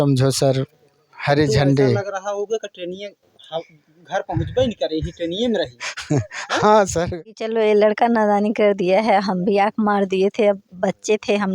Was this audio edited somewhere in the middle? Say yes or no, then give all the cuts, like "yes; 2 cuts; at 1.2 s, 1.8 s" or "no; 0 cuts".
yes; 1 cut; at 7.1 s